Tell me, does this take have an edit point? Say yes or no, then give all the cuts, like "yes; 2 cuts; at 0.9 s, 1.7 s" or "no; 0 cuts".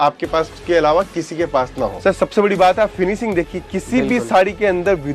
yes; 1 cut; at 1.9 s